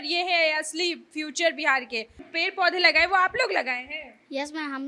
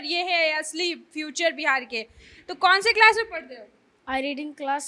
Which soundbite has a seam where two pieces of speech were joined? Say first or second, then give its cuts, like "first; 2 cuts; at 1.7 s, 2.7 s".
first; 1 cut; at 2.3 s